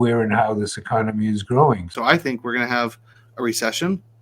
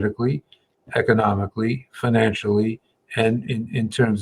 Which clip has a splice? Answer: first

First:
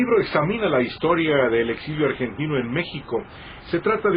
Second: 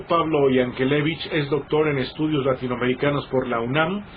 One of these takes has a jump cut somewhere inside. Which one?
first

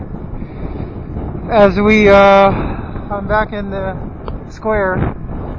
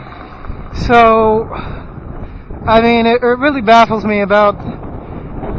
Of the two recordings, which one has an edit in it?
first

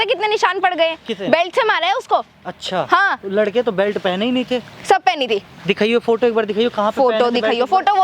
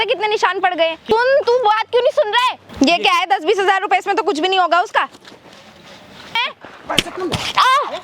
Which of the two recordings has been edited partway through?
second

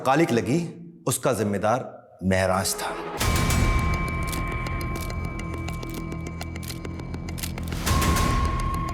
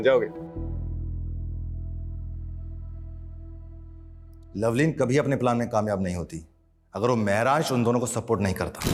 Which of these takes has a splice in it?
first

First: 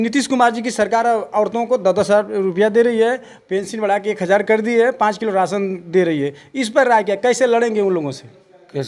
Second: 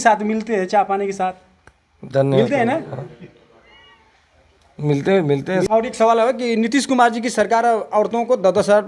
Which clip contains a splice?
second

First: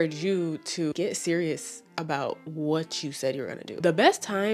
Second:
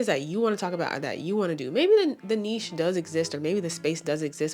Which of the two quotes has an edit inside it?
first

